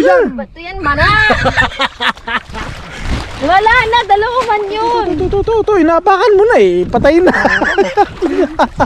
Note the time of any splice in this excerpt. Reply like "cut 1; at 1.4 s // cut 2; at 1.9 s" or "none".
cut 1; at 5.2 s